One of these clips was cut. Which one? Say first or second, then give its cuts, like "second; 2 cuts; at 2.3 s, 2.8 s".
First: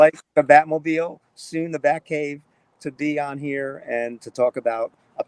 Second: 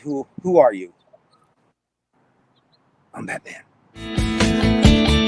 second; 1 cut; at 4.3 s